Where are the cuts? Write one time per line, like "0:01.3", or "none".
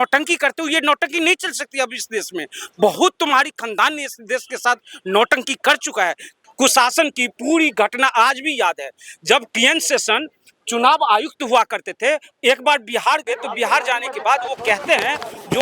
0:06.3